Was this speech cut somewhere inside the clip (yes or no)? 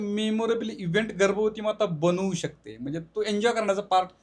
no